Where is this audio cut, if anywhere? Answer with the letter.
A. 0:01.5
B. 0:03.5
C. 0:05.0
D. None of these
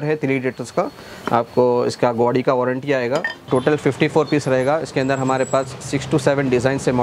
B